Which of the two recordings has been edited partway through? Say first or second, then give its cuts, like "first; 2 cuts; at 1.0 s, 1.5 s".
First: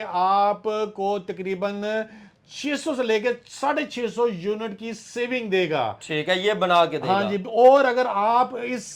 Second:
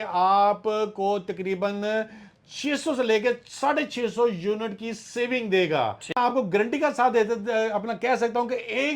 second; 1 cut; at 6.1 s